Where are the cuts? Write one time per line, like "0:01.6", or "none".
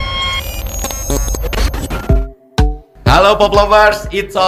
0:02.0